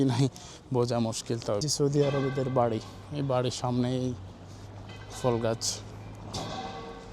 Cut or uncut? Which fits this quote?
cut